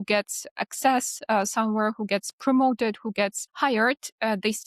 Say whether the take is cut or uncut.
cut